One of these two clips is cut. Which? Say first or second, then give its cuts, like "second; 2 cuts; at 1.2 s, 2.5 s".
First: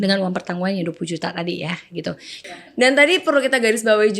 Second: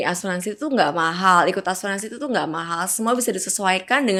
first; 1 cut; at 2.3 s